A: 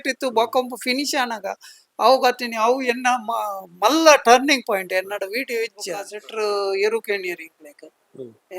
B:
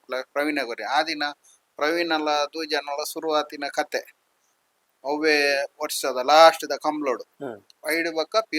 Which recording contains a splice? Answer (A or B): A